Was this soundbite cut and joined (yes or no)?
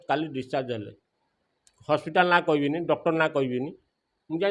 no